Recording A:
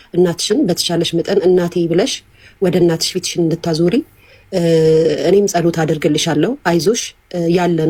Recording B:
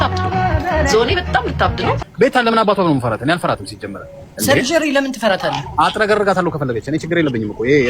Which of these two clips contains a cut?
B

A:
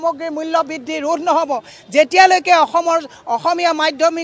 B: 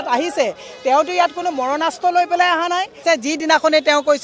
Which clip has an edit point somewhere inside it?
B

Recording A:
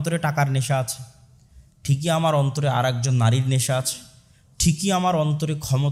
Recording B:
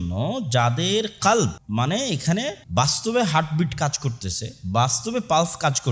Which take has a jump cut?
B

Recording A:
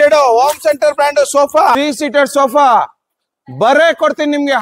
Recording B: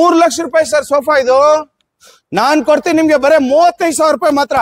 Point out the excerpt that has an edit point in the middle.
A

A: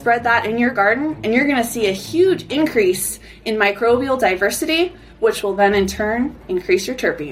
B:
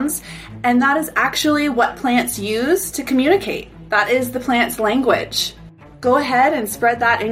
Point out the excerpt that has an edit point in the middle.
B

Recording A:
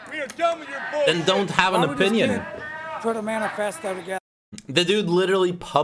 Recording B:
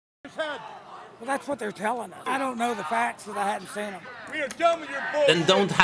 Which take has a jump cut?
B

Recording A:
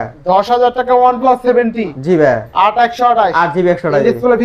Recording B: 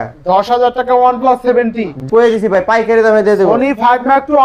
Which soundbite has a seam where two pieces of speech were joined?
B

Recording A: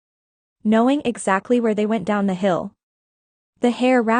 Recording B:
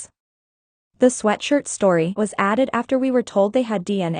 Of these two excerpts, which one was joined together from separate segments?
B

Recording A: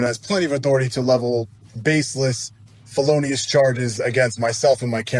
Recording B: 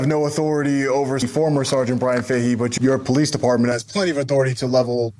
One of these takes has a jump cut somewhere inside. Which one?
B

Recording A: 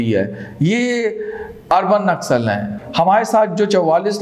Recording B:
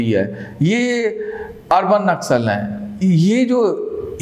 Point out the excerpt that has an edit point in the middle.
A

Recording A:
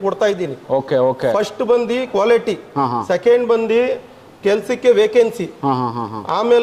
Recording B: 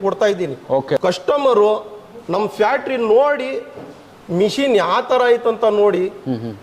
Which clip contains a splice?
B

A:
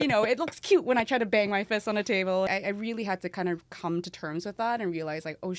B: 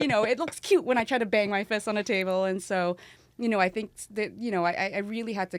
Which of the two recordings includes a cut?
A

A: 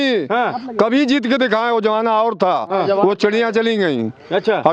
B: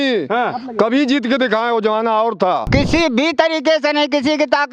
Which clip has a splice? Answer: B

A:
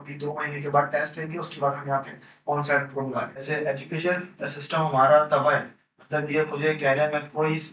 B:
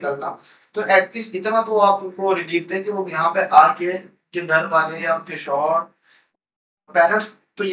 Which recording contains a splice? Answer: A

